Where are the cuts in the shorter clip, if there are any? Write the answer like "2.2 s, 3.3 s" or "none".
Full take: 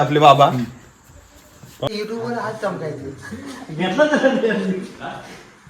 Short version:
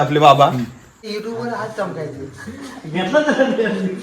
1.1 s